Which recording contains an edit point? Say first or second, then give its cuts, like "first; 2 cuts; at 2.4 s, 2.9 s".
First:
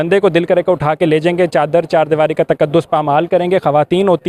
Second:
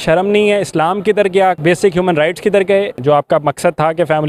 second; 2 cuts; at 1.6 s, 3.0 s